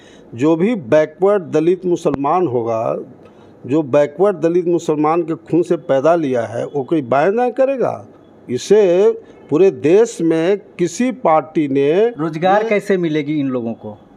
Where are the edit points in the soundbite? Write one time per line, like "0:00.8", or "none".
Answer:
none